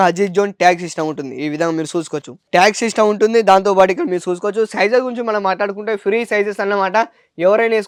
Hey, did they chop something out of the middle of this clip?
no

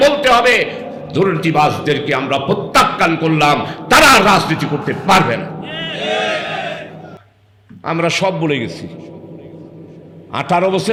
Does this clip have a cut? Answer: no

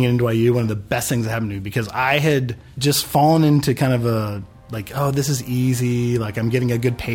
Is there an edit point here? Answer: yes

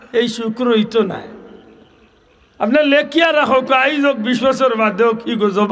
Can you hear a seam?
no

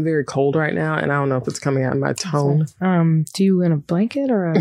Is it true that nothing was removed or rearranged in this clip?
no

